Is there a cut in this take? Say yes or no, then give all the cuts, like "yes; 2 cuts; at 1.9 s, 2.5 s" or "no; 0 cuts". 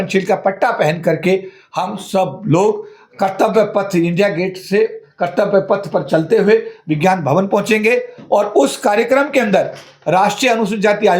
no; 0 cuts